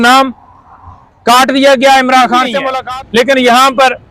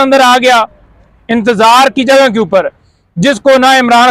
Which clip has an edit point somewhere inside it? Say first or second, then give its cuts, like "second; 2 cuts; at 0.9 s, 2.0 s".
first; 1 cut; at 2.5 s